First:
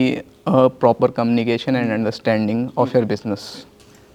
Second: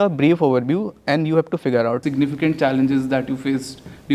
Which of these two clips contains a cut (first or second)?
second